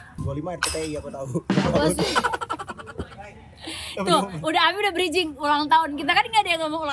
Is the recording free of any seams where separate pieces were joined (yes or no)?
yes